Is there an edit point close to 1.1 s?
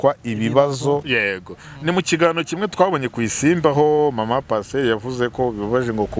yes; 1 cut; at 1.1 s

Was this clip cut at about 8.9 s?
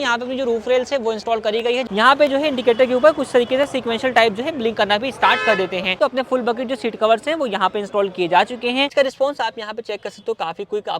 yes; 3 cuts; at 1.8 s, 5.9 s, 8.9 s

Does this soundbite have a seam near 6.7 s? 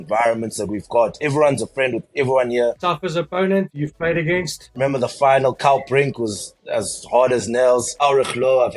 no; 2 cuts; at 2.8 s, 4.8 s

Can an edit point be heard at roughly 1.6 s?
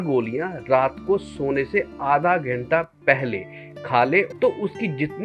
no; 1 cut; at 4.3 s

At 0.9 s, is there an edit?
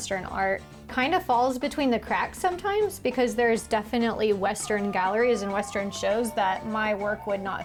no; 0 cuts

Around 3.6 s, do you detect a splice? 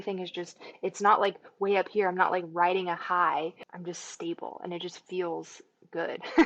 yes; 1 cut; at 3.6 s

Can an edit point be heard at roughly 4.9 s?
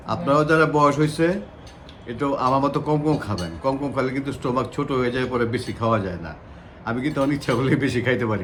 no; 0 cuts

